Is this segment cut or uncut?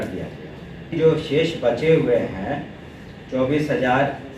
cut